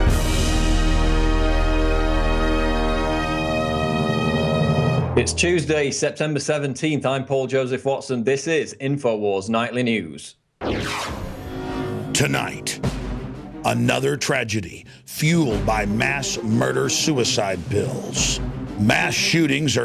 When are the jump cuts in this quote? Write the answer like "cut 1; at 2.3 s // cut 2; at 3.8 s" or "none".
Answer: none